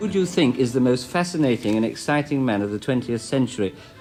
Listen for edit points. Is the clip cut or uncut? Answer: uncut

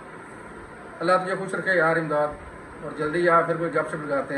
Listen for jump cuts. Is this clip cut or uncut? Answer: uncut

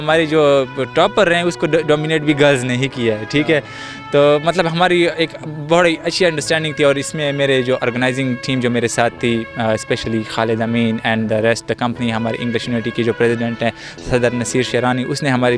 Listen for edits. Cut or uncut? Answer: uncut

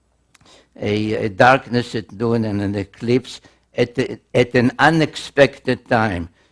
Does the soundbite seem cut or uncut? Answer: cut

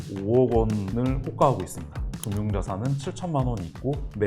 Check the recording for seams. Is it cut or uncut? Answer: cut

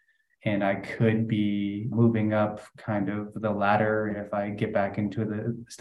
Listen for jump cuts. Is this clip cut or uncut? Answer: cut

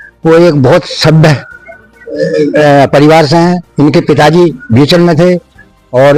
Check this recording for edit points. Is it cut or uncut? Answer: uncut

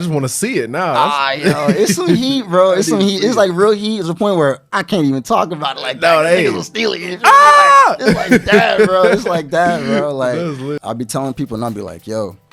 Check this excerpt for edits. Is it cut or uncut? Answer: cut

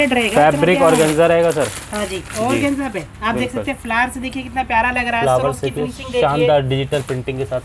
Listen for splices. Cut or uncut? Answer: uncut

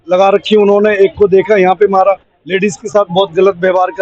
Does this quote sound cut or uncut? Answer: uncut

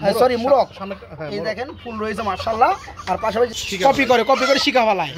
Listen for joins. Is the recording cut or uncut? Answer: cut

